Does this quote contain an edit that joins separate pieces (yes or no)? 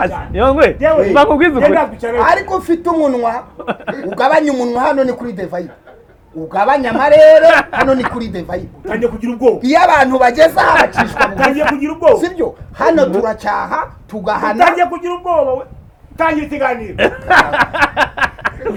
no